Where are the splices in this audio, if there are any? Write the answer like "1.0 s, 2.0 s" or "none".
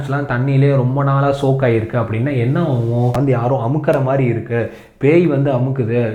3.1 s